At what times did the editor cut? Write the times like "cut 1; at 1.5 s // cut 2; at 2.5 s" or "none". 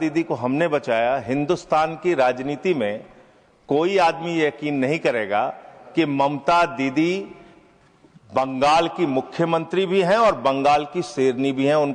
none